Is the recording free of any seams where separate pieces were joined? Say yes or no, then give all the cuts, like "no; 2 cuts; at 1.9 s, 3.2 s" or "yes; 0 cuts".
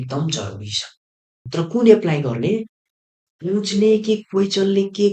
no; 1 cut; at 1.5 s